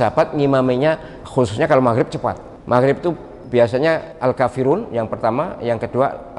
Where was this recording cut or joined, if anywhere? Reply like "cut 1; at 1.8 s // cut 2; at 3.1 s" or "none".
cut 1; at 1.1 s // cut 2; at 2.5 s // cut 3; at 3.3 s // cut 4; at 4.1 s